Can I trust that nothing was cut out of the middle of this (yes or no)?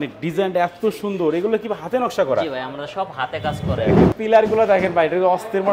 no